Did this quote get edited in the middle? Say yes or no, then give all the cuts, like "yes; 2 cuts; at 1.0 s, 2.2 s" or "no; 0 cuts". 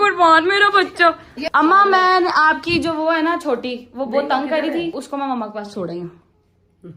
yes; 2 cuts; at 1.3 s, 5.0 s